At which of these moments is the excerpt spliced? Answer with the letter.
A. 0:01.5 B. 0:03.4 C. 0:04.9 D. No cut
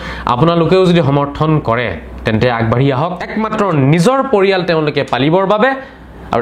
B